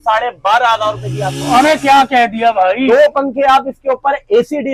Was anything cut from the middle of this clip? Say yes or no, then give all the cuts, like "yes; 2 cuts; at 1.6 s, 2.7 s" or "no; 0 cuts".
no; 0 cuts